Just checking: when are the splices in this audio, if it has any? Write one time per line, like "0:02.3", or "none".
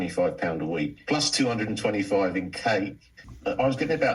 0:03.2